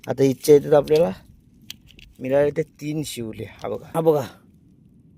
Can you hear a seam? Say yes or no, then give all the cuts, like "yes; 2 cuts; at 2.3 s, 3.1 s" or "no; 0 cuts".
yes; 1 cut; at 3.9 s